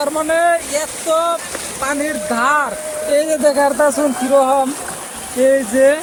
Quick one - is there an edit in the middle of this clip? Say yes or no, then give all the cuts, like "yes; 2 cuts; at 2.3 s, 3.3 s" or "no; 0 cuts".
no; 0 cuts